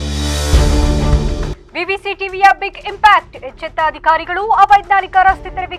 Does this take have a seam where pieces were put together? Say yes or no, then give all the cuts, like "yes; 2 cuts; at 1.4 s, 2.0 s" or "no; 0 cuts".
yes; 1 cut; at 1.2 s